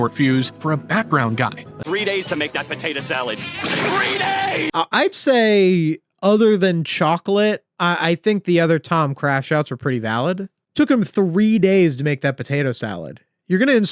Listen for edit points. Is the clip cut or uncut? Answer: cut